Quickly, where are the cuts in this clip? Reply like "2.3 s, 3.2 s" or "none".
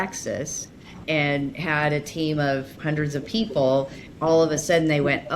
1.0 s, 2.8 s